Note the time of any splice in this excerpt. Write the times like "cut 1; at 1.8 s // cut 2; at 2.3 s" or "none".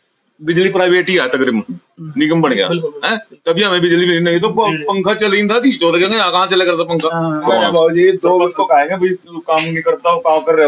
cut 1; at 7.4 s